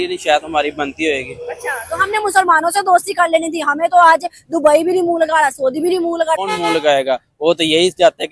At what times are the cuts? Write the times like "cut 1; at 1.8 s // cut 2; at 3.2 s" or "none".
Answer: cut 1; at 6.4 s